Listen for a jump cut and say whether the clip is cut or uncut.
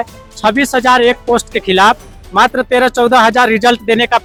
uncut